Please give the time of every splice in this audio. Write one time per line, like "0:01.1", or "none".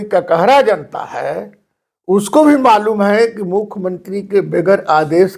none

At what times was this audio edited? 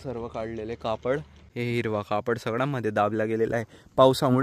0:01.4

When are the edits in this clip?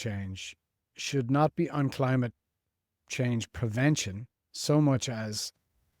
none

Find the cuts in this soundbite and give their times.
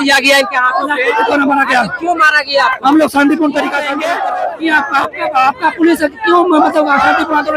0:03.9

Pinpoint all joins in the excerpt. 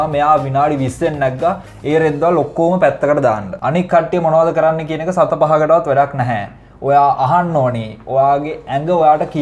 0:03.5

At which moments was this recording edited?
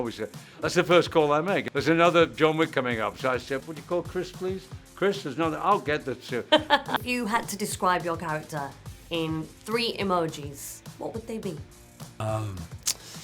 0:01.7
0:03.7
0:07.0
0:12.2

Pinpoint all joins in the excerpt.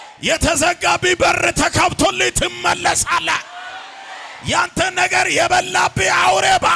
none

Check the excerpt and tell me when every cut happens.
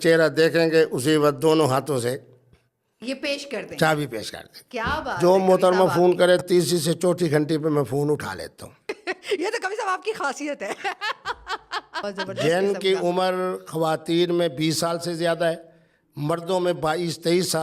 0:05.2
0:12.0

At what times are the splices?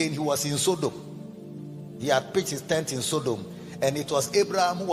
none

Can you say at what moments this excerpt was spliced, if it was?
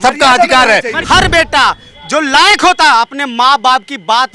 0:00.9

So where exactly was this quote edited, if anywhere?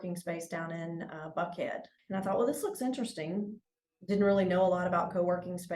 0:01.9

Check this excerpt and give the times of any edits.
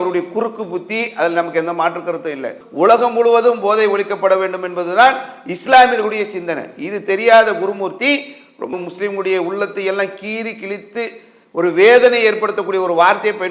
0:02.6
0:08.7

